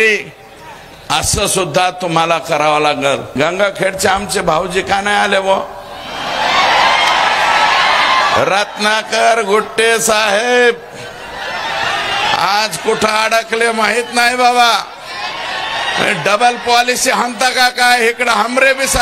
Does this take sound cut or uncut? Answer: cut